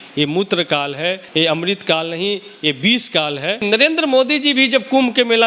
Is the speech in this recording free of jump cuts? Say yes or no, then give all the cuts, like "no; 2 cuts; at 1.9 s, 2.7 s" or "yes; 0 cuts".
no; 2 cuts; at 1.2 s, 3.6 s